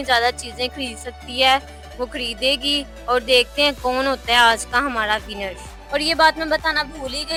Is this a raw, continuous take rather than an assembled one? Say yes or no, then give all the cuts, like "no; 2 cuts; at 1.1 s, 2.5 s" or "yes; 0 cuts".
yes; 0 cuts